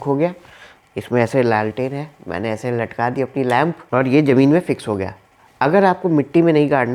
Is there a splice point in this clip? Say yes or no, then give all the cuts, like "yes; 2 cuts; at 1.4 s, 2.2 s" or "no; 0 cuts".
no; 0 cuts